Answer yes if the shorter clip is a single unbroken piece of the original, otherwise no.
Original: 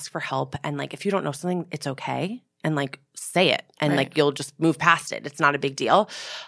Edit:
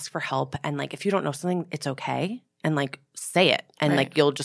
yes